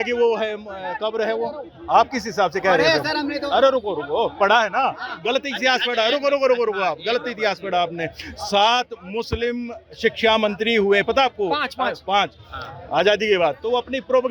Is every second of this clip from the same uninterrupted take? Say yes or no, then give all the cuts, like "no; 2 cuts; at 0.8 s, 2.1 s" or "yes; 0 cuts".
yes; 0 cuts